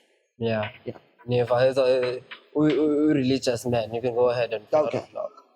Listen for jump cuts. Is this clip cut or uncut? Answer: uncut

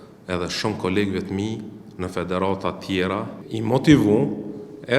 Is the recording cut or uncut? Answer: cut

